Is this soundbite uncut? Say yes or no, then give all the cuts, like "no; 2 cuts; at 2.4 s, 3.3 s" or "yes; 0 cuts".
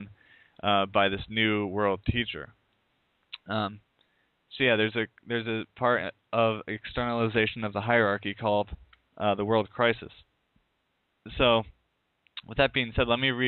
yes; 0 cuts